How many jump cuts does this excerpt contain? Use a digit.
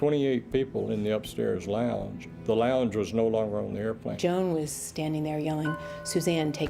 1